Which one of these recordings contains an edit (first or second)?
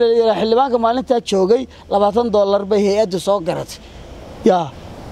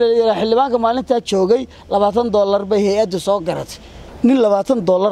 second